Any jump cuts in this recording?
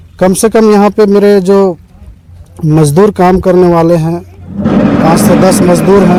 no; 0 cuts

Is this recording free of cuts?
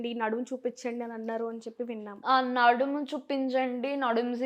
yes; 0 cuts

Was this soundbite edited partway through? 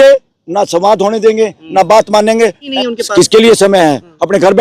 yes; 1 cut; at 2.7 s

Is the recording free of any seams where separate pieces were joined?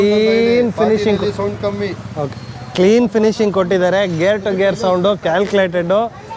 yes; 0 cuts

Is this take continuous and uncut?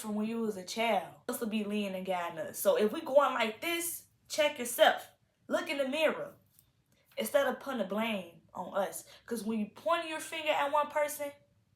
no; 1 cut; at 1.3 s

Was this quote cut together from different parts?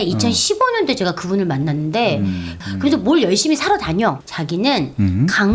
yes; 2 cuts; at 2.6 s, 4.2 s

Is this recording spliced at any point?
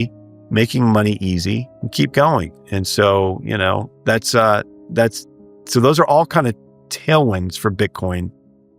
yes; 2 cuts; at 1.8 s, 3.9 s

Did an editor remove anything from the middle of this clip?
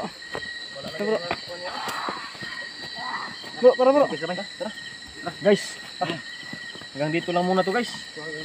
no; 0 cuts

